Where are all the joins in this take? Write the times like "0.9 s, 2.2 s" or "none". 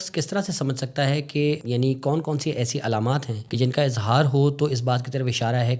1.6 s, 3.4 s

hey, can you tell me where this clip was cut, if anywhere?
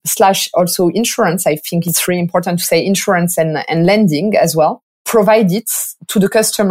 4.9 s

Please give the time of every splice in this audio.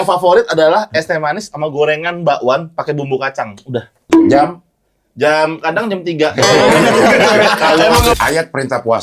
4.0 s, 8.1 s

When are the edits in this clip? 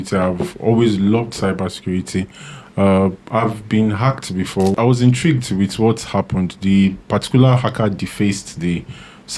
4.7 s

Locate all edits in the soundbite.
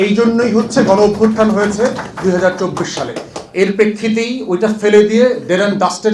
none

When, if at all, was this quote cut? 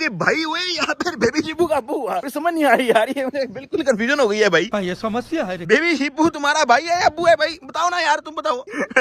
none

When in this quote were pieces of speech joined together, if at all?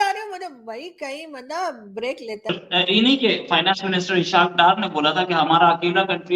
2.5 s

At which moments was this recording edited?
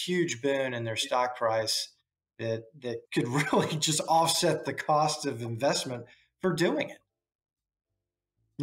none

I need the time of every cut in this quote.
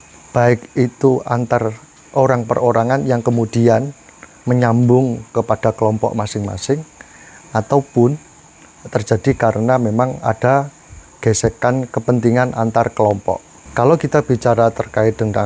13.6 s

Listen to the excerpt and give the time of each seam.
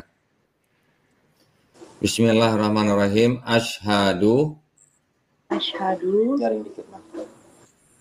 none

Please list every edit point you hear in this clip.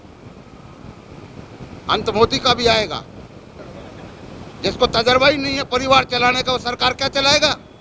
3.6 s

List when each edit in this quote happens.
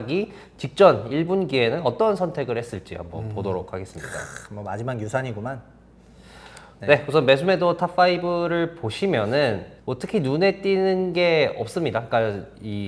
none

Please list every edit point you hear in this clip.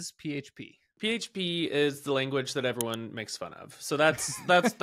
0.9 s

